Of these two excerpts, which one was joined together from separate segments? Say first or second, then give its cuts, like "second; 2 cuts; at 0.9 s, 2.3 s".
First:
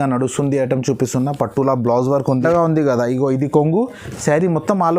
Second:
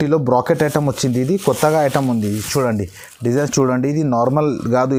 first; 1 cut; at 2.3 s